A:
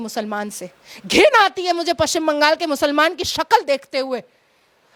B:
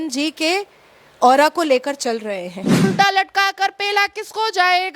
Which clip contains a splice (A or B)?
B